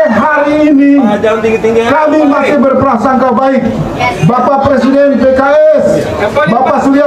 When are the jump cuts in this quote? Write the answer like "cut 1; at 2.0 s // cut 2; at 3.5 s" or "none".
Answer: none